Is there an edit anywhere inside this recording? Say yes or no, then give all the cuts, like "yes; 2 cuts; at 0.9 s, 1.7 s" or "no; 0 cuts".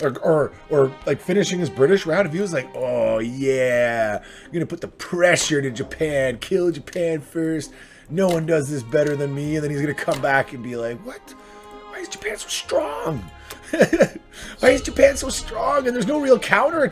no; 0 cuts